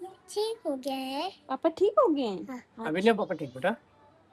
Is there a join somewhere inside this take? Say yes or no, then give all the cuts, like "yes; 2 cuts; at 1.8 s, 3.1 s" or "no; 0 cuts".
no; 0 cuts